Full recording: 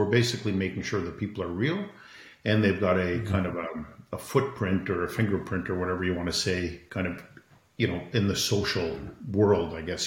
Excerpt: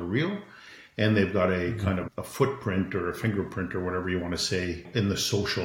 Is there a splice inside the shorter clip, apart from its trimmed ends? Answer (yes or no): yes